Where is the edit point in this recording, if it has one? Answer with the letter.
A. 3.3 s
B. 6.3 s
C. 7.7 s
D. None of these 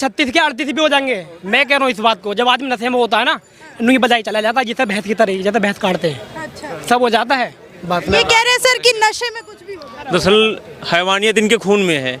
C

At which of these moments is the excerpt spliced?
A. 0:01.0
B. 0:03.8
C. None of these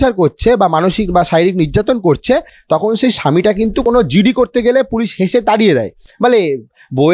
B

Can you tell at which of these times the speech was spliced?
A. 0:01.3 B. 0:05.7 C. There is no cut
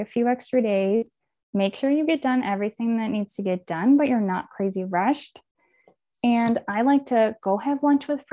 C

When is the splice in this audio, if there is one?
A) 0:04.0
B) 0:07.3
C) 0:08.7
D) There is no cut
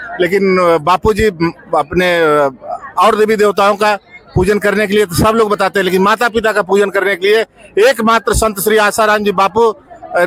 D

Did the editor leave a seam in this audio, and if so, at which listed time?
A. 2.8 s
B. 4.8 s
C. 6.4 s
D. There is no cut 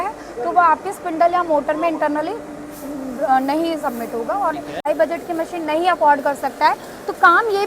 B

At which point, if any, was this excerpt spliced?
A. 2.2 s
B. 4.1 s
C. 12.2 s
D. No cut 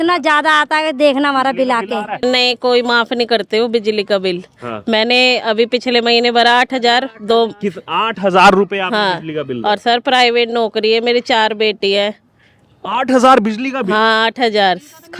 A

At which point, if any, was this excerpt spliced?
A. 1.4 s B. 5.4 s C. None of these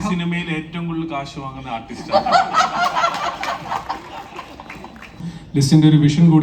B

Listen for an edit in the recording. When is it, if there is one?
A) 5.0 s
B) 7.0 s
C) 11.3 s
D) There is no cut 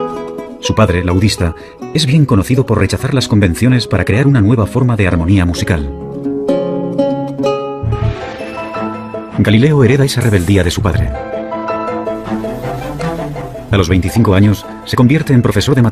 A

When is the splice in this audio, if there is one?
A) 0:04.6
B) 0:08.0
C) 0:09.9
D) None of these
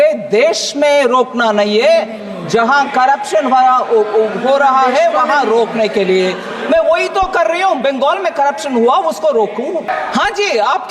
C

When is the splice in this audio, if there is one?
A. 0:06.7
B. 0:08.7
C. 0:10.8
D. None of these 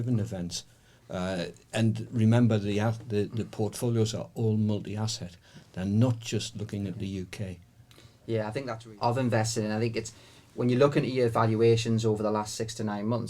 B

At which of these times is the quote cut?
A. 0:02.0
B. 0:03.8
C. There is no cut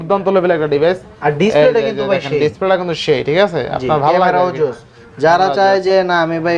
C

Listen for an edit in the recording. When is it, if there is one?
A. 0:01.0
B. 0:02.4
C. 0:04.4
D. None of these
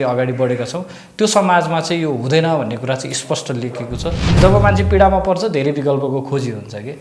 C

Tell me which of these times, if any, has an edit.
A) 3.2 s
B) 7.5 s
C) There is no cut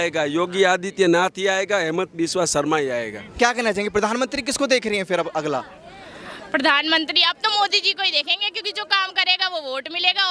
A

